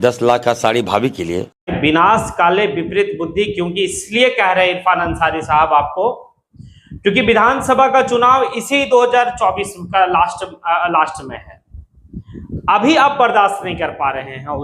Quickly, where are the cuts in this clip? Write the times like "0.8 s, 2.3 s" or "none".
1.4 s

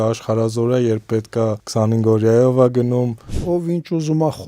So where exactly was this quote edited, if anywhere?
1.6 s, 3.4 s

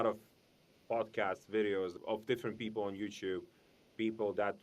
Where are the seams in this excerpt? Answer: 2.0 s

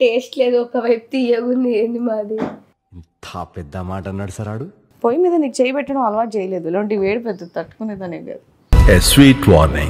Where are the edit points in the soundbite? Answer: 4.8 s

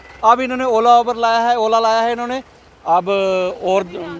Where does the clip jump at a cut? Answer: none

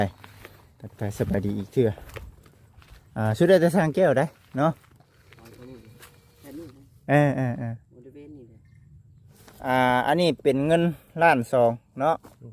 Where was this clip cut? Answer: 9.3 s

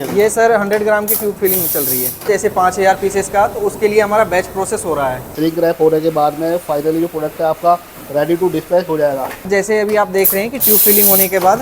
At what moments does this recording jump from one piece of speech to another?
2.2 s, 5.2 s, 9.5 s

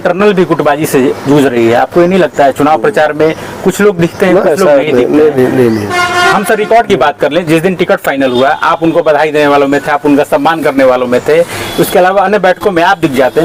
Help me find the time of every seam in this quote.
none

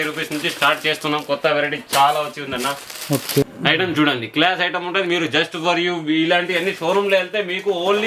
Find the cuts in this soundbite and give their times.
3.4 s

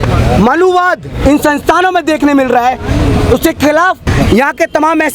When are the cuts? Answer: 4.1 s

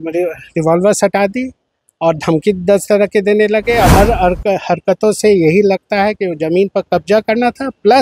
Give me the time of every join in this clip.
3.9 s

